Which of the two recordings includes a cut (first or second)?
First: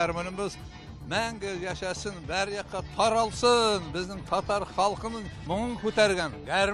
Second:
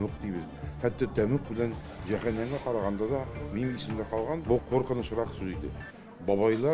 second